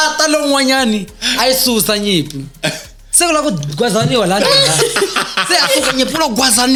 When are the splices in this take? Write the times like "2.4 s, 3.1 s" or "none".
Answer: none